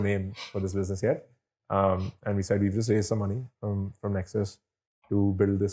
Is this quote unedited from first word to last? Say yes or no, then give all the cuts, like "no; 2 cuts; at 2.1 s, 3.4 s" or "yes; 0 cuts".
yes; 0 cuts